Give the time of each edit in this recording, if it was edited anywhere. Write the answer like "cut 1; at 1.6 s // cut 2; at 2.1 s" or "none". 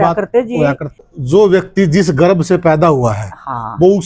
cut 1; at 1.0 s